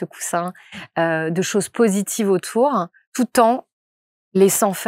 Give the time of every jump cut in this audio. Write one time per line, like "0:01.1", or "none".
0:03.0